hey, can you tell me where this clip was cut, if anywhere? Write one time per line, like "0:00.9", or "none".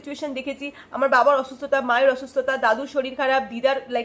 none